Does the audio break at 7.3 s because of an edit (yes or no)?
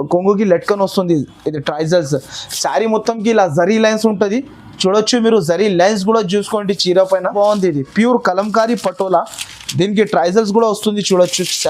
yes